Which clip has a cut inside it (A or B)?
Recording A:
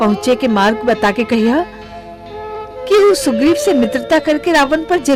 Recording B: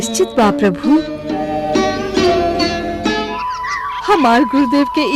B